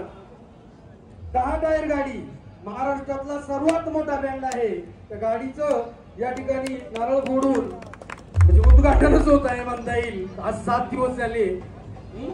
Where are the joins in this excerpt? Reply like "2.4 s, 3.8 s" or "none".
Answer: none